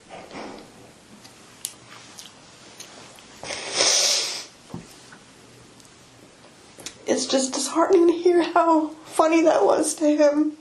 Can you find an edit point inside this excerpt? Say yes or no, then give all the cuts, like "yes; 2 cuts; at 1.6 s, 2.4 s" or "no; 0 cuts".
no; 0 cuts